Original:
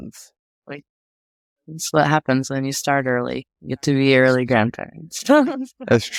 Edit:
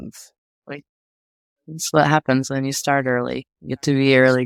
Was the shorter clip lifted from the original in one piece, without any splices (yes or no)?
yes